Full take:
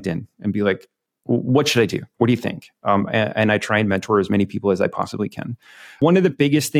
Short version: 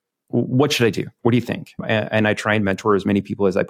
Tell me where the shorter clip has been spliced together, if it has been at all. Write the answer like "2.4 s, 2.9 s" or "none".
1.8 s